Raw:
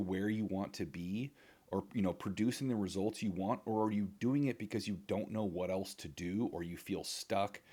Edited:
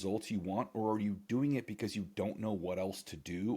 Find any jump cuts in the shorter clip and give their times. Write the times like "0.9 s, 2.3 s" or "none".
none